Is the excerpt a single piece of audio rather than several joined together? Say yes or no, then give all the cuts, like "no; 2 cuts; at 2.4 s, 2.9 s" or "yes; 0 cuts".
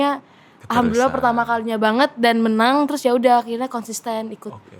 yes; 0 cuts